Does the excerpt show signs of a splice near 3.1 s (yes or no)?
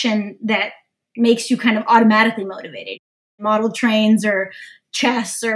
yes